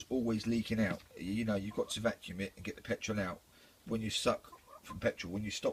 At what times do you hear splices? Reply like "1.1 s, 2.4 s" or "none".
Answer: none